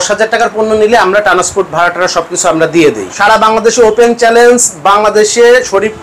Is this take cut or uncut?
cut